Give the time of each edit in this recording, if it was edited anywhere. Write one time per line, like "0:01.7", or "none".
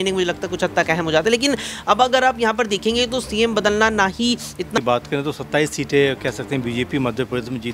0:04.8